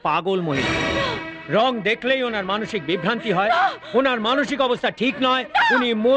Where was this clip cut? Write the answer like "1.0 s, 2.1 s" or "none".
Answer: none